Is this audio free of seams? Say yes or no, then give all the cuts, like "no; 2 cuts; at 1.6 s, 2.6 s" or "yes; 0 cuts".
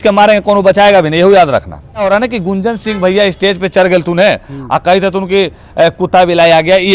no; 1 cut; at 2.0 s